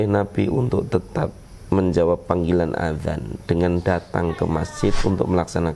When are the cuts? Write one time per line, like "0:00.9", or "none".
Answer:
none